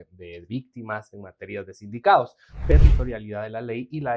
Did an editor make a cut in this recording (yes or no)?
yes